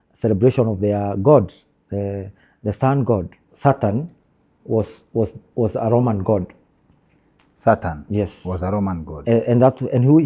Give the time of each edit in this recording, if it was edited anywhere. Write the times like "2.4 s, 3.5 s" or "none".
3.4 s